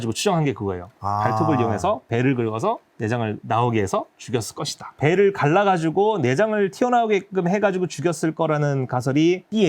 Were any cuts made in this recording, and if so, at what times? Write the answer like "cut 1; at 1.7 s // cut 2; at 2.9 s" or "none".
cut 1; at 4.8 s